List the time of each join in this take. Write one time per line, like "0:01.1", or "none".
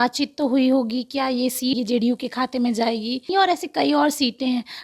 0:01.8
0:03.3